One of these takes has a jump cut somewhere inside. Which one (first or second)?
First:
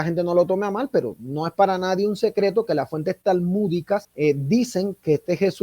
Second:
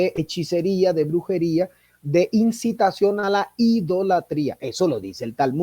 first